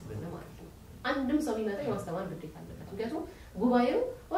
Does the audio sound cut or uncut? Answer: uncut